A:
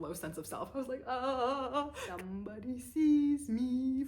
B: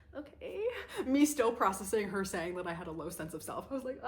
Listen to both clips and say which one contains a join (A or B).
A